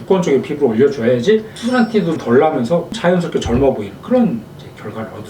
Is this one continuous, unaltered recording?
no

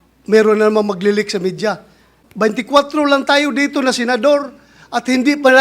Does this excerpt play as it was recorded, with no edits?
no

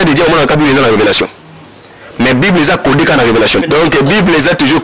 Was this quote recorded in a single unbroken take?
no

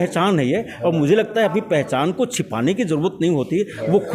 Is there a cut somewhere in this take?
no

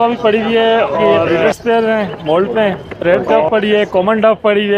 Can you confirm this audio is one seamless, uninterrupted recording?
no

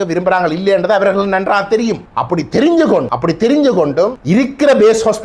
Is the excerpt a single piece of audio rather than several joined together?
no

